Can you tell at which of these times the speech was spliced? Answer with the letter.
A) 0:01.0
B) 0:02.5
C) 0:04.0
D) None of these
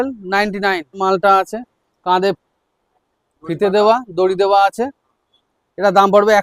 A